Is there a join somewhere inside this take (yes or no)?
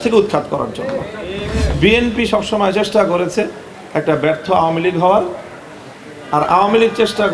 yes